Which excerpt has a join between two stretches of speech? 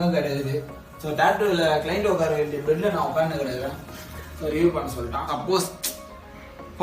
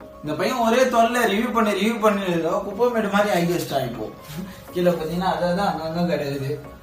first; 1 cut; at 5.3 s

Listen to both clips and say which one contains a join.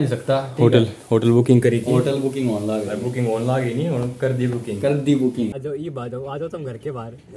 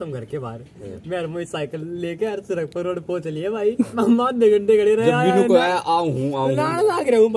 first; 1 cut; at 5.6 s

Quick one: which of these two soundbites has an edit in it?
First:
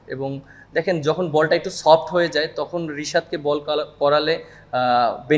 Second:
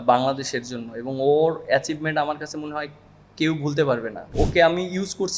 second; 1 cut; at 4.3 s

